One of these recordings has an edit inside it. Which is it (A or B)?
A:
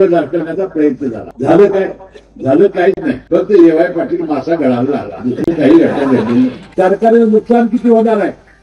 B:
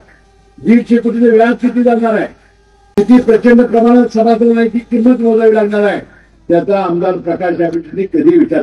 A